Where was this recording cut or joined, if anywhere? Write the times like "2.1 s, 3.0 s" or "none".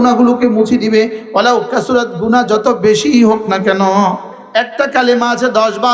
4.3 s